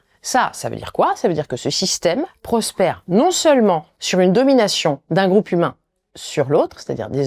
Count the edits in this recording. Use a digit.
1